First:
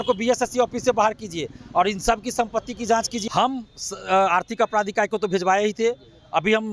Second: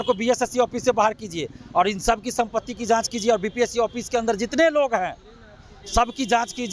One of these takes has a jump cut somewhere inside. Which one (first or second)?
first